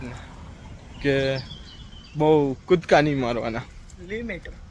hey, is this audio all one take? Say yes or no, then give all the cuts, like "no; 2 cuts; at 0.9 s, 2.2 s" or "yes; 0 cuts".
yes; 0 cuts